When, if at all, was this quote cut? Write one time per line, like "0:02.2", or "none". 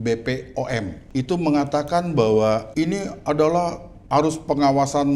0:01.0
0:02.7
0:04.0